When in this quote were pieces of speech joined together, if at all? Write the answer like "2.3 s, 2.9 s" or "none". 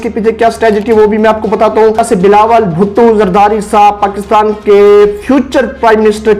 2.0 s